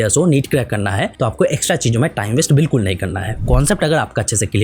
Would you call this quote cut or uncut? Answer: cut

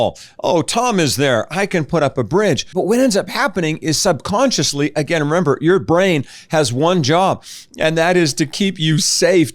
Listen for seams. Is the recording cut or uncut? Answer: cut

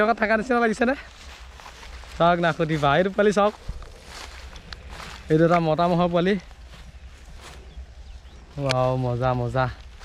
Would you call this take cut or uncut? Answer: uncut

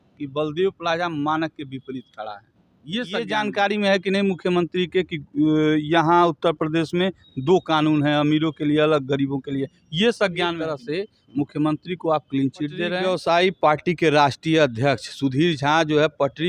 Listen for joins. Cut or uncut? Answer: cut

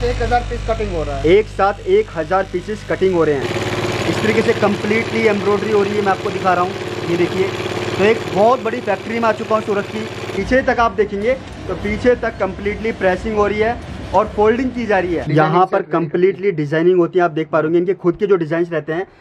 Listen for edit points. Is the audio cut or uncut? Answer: cut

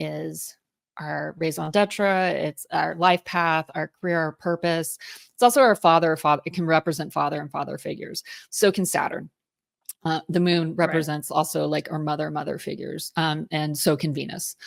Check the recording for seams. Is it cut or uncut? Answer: uncut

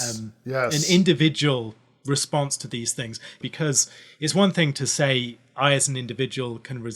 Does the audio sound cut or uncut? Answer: cut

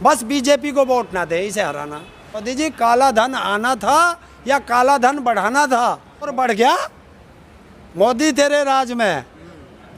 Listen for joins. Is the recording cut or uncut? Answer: cut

